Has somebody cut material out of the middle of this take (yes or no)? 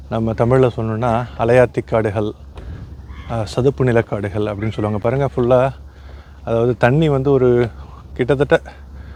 no